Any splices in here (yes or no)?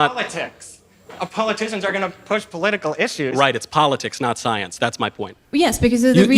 yes